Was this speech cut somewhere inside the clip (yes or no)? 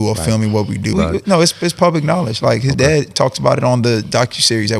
yes